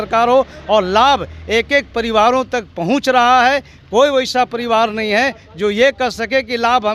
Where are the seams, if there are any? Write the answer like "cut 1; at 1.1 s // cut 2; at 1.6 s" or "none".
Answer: none